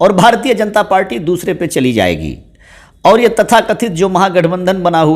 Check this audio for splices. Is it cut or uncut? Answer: uncut